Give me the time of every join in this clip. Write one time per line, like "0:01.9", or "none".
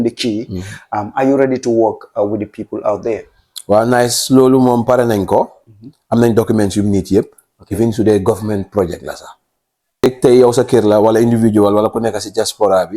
0:10.1